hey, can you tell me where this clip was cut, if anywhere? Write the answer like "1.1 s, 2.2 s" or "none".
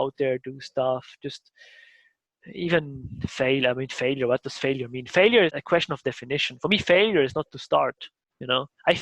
5.5 s